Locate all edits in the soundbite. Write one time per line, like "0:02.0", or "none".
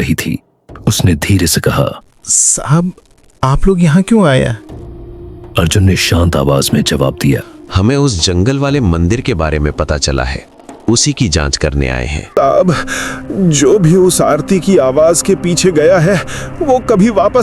0:12.2